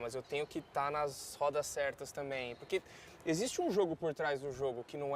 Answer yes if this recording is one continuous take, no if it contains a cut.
yes